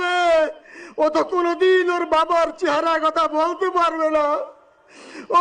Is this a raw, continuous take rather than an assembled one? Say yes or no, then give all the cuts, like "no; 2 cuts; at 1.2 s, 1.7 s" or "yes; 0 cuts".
yes; 0 cuts